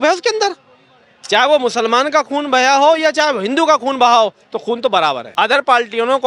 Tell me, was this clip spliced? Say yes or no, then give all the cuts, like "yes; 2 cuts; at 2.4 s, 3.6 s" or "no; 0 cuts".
yes; 1 cut; at 5.2 s